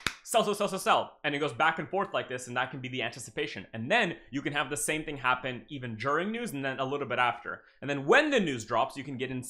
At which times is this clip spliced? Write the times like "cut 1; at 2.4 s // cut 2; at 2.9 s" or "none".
none